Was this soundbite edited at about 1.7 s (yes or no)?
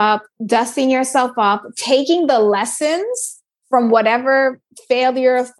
no